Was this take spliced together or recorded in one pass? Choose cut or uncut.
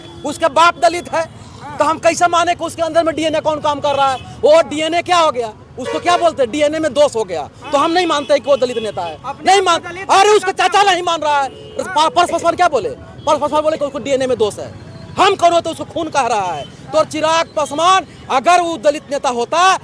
uncut